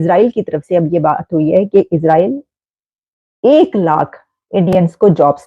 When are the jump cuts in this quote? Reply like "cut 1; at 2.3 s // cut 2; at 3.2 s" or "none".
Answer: none